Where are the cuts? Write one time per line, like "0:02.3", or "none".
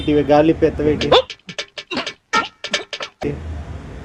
none